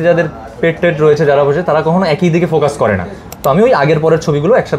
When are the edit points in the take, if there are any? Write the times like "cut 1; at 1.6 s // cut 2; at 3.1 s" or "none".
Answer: none